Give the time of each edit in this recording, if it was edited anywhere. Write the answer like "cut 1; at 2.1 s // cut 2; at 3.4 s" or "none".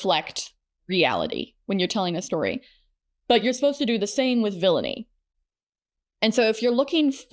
none